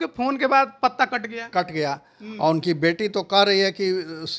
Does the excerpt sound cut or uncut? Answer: uncut